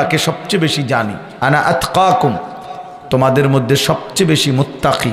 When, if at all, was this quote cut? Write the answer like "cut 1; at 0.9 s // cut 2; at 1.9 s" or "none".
cut 1; at 1.2 s